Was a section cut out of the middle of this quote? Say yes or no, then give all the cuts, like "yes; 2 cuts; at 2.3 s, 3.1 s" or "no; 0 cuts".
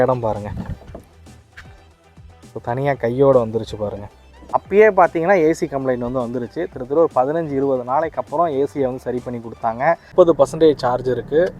yes; 2 cuts; at 4.3 s, 10.0 s